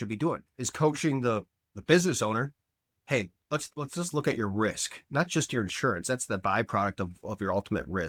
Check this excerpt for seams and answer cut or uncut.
uncut